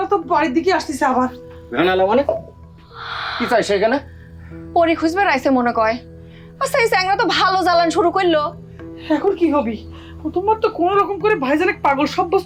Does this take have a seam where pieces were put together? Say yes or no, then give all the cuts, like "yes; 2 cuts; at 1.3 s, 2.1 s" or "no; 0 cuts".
no; 0 cuts